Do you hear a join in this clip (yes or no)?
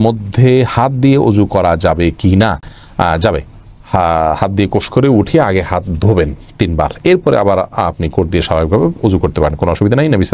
no